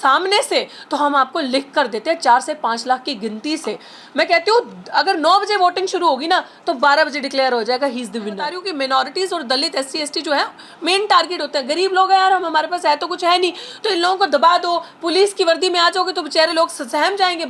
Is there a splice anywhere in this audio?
yes; 1 cut; at 8.6 s

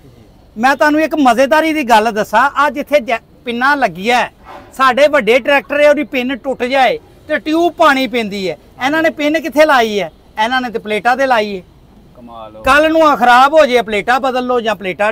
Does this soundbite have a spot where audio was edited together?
no; 0 cuts

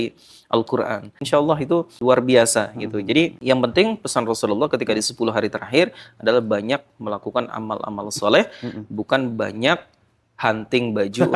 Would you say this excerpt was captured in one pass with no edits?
no; 3 cuts; at 1.1 s, 2.0 s, 3.4 s

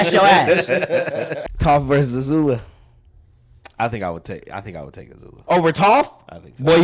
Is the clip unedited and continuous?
no; 1 cut; at 1.4 s

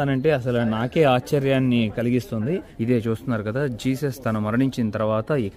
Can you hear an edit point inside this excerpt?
yes; 1 cut; at 2.7 s

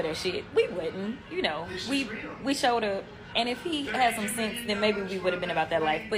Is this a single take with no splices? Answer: no; 1 cut; at 1.6 s

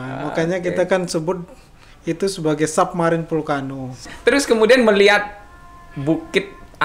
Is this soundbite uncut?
no; 1 cut; at 4.1 s

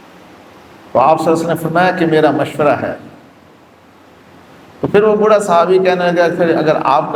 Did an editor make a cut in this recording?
no; 0 cuts

